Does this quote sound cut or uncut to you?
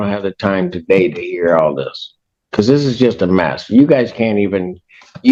uncut